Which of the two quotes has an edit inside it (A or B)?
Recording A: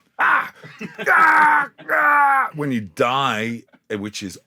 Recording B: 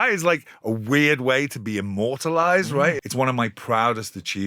B